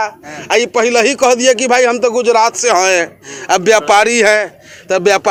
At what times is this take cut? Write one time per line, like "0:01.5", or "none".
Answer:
none